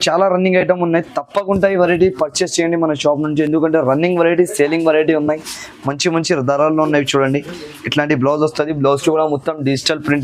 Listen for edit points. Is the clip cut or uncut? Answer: uncut